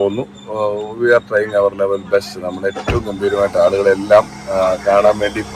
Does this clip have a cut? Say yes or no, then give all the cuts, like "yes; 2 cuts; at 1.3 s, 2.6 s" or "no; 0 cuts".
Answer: no; 0 cuts